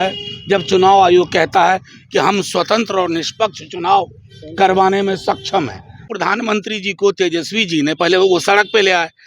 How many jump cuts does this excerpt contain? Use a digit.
1